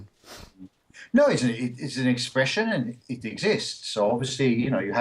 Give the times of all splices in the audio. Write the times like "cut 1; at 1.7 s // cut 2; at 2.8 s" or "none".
cut 1; at 2.3 s